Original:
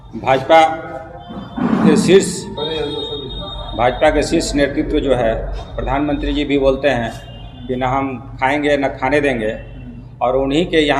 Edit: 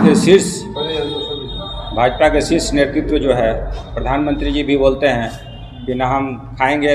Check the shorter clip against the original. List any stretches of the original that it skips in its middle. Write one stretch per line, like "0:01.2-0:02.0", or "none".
none